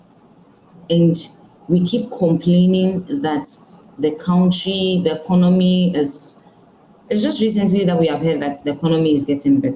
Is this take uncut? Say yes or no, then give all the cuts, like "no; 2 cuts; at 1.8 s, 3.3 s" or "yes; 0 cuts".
yes; 0 cuts